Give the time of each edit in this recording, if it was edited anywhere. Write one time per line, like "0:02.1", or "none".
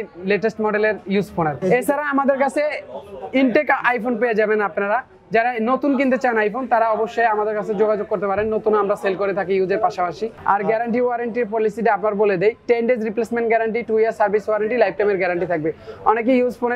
0:01.6
0:10.3